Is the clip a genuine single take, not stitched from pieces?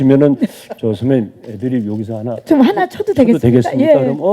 yes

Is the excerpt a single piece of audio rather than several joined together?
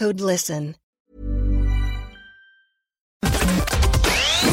no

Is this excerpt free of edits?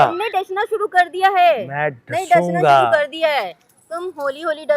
yes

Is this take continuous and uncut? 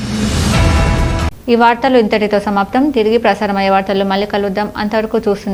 yes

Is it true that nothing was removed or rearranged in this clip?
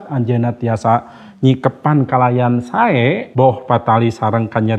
no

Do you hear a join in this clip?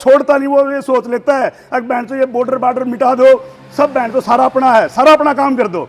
no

